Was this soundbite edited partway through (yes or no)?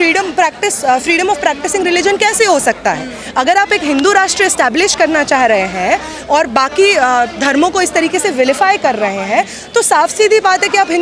no